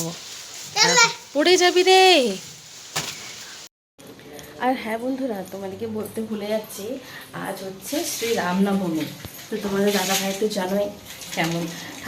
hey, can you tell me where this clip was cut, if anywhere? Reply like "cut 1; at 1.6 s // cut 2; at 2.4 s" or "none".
cut 1; at 3.7 s